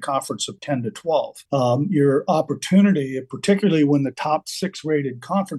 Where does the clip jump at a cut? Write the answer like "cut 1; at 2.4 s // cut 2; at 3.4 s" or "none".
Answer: cut 1; at 1.4 s